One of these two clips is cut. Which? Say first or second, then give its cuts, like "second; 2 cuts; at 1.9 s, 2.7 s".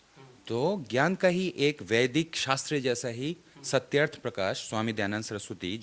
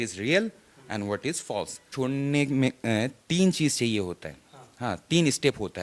second; 1 cut; at 1.9 s